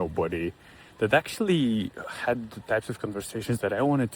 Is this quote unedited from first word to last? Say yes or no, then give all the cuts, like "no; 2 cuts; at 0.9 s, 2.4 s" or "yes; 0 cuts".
yes; 0 cuts